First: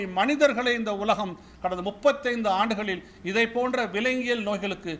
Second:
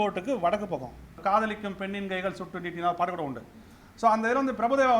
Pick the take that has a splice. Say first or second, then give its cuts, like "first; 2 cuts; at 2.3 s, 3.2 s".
second; 1 cut; at 1.1 s